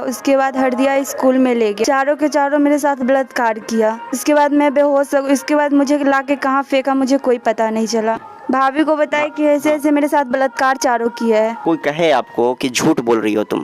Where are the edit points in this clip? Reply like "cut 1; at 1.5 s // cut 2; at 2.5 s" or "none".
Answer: cut 1; at 1.8 s // cut 2; at 4.2 s // cut 3; at 8.2 s // cut 4; at 11.6 s